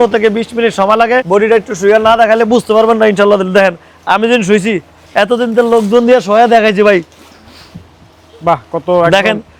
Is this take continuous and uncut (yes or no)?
no